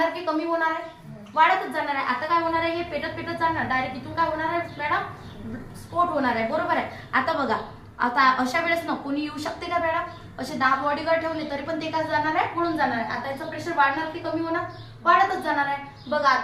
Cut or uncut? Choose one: uncut